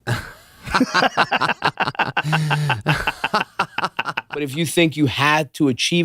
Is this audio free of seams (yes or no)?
no